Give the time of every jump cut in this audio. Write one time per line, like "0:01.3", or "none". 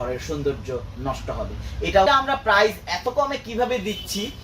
0:02.1